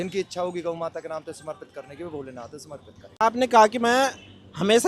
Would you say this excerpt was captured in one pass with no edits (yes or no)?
yes